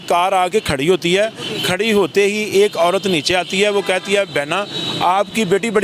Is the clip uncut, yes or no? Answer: yes